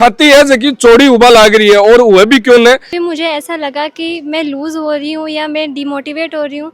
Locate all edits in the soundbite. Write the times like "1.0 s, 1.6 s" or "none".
2.9 s